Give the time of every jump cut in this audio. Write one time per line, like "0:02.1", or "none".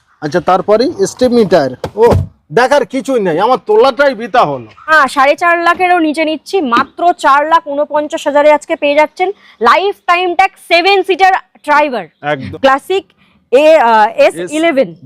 0:04.9
0:12.5